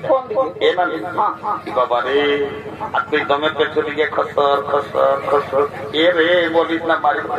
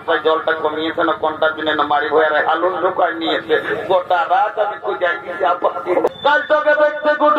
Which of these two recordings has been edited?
second; 1 cut; at 6.1 s

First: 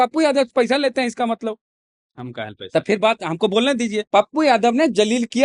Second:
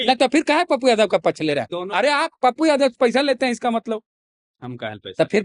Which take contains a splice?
first; 1 cut; at 4.0 s

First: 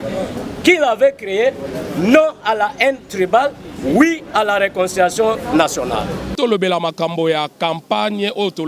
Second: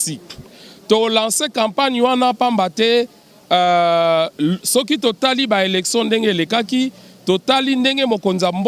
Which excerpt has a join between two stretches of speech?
first; 1 cut; at 6.3 s

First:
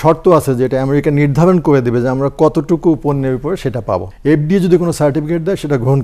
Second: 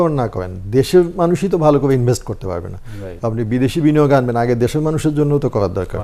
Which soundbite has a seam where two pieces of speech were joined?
first; 1 cut; at 4.1 s

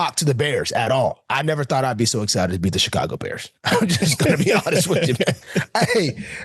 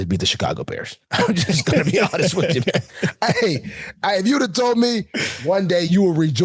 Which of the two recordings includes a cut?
first; 1 cut; at 1.2 s

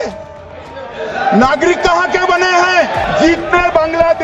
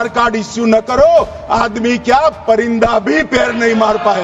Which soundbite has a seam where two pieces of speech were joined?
first; 1 cut; at 3.0 s

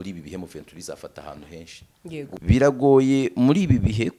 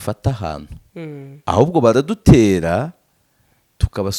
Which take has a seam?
first; 1 cut; at 2.4 s

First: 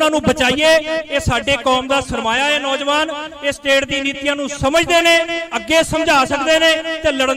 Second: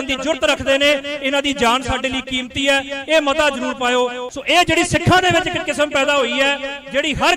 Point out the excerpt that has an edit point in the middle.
second; 1 cut; at 4.2 s

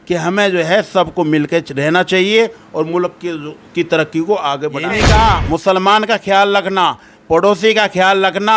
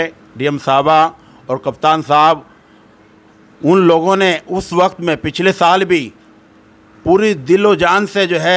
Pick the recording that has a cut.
first; 1 cut; at 4.9 s

